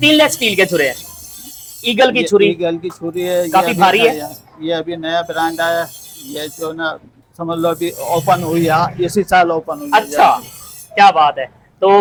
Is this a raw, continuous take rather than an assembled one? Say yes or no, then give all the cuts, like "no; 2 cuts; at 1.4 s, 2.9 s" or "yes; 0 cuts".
yes; 0 cuts